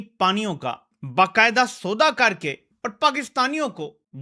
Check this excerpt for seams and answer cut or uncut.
uncut